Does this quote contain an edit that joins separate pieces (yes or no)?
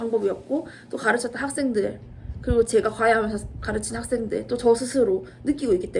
no